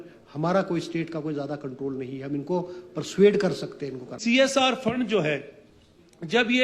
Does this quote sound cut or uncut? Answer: cut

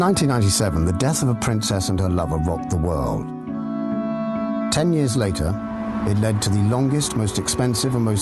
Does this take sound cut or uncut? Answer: uncut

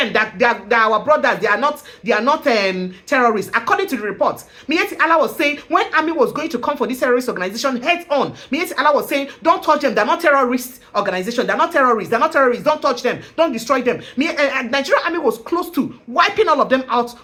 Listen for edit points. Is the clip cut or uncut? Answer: uncut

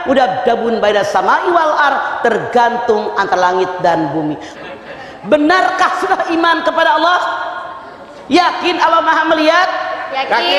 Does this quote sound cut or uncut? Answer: cut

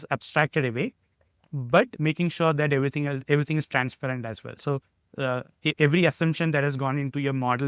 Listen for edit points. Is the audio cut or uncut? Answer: uncut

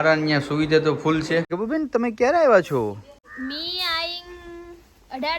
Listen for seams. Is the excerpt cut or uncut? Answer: cut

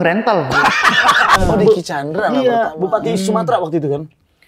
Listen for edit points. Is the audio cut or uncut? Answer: cut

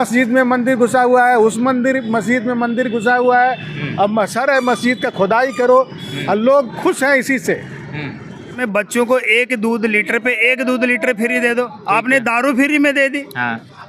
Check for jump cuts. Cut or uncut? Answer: cut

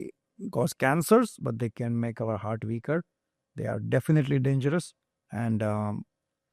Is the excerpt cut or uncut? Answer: uncut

